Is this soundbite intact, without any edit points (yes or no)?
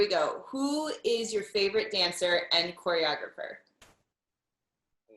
yes